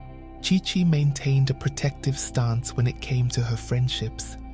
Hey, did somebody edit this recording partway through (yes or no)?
no